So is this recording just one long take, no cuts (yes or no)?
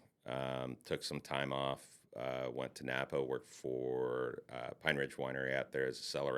yes